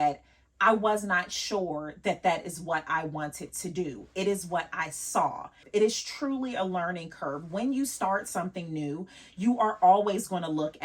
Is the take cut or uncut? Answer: cut